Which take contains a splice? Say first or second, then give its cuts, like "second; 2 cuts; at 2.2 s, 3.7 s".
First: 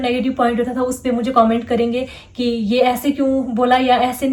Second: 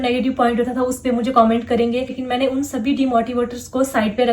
second; 1 cut; at 2.2 s